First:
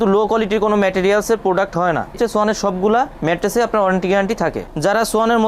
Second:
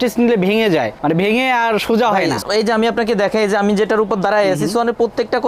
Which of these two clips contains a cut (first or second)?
first